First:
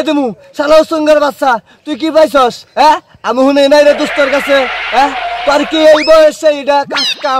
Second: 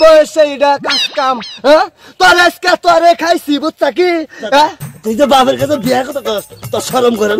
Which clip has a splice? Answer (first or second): second